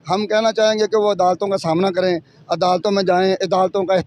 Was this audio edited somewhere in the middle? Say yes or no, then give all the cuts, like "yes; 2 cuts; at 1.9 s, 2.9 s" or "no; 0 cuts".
no; 0 cuts